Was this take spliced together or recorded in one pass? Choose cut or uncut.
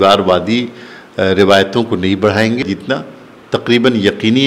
cut